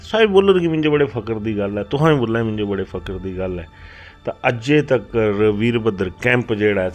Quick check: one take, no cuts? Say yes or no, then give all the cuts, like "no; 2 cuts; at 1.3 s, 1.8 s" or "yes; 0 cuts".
yes; 0 cuts